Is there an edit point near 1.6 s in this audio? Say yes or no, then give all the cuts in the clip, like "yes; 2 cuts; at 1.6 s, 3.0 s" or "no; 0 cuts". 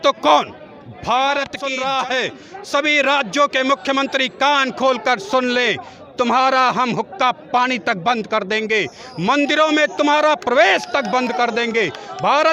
yes; 1 cut; at 1.6 s